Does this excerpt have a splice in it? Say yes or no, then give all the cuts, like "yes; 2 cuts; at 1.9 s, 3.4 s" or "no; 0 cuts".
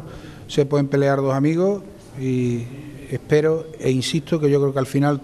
yes; 1 cut; at 1.9 s